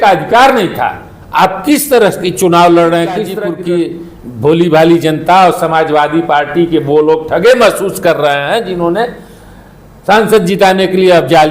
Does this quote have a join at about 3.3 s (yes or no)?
yes